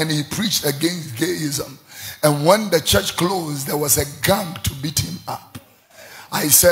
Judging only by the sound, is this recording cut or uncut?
uncut